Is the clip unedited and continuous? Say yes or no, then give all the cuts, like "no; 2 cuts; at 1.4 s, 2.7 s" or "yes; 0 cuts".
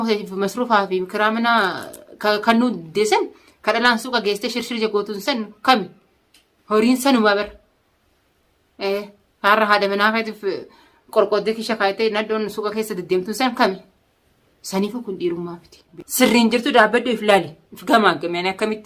no; 1 cut; at 15.9 s